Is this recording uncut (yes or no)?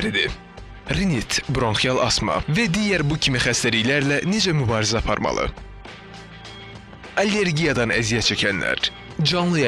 yes